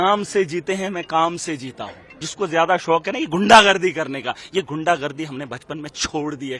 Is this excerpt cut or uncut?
cut